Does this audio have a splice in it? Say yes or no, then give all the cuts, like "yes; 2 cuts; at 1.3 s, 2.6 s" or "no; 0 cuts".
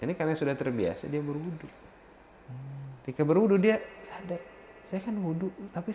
no; 0 cuts